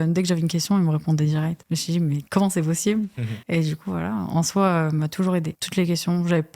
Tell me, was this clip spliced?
no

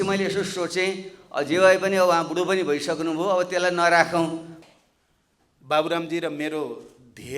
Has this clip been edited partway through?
yes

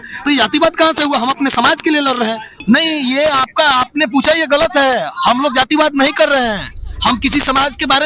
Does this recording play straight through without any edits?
no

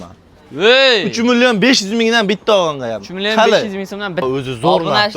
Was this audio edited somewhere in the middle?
yes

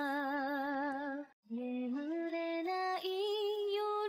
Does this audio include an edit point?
yes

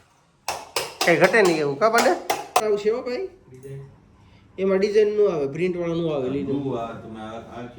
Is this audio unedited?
no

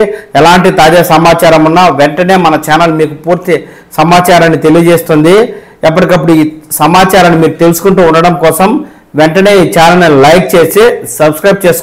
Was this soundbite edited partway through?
no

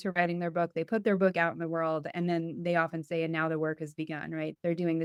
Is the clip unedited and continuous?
yes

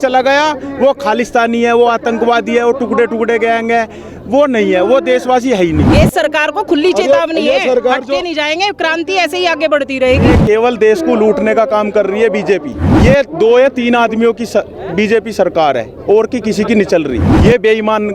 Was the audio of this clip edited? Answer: yes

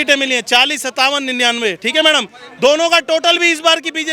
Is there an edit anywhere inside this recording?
no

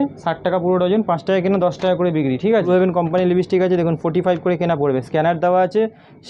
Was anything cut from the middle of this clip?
no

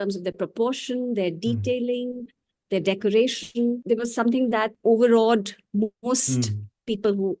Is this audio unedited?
no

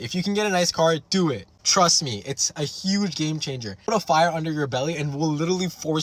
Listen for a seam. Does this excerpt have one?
no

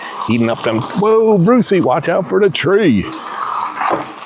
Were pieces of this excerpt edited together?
no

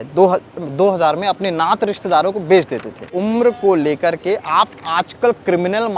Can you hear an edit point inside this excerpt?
yes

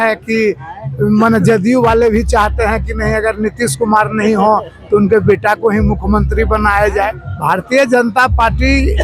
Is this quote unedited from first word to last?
no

